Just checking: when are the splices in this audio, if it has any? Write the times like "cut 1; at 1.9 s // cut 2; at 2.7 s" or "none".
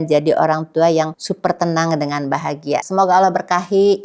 none

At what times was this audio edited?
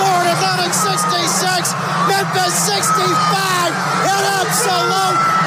none

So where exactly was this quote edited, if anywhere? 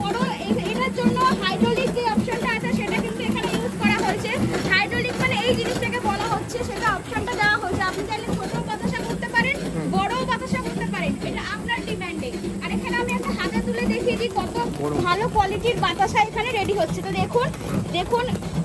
none

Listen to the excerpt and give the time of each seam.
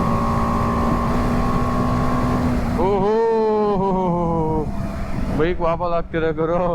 cut 1; at 1.1 s

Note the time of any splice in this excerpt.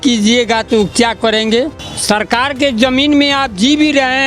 cut 1; at 1.8 s

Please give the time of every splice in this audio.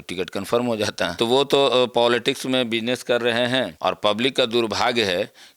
cut 1; at 1.1 s // cut 2; at 3.7 s

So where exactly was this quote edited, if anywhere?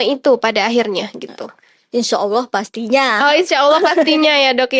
none

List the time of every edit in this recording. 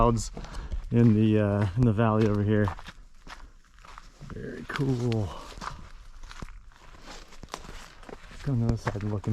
none

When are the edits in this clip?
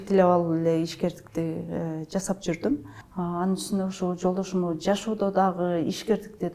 cut 1; at 3.0 s

